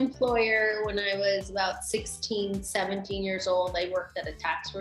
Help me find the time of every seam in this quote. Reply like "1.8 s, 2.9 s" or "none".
none